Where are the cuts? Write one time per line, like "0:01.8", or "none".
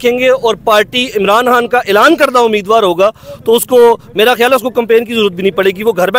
none